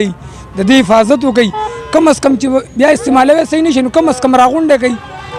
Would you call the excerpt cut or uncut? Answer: uncut